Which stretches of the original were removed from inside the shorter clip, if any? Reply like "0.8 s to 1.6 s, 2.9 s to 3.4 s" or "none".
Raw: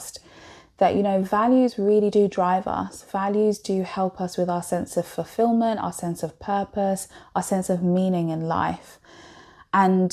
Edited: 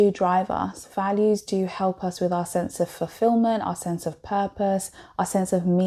none